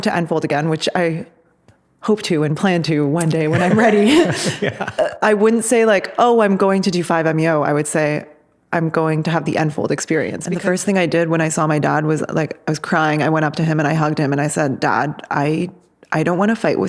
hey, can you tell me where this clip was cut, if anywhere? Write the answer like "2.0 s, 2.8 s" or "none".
10.4 s